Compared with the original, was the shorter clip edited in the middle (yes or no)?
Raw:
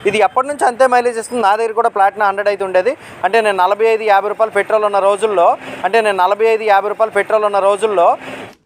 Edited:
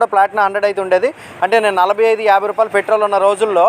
yes